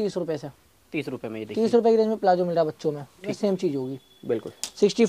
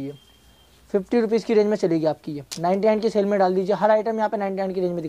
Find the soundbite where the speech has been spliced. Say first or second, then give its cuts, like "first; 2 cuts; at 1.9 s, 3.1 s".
first; 1 cut; at 3.3 s